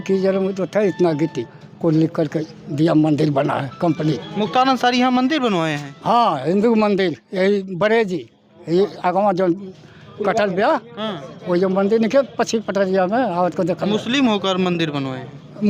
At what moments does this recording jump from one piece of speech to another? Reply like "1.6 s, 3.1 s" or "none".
none